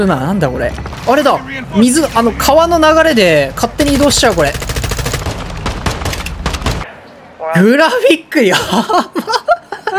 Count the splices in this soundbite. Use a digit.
2